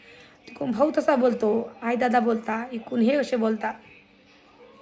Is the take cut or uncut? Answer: uncut